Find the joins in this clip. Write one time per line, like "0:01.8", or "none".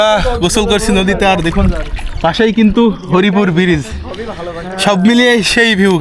none